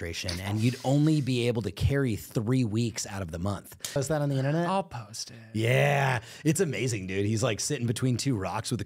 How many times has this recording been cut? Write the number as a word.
one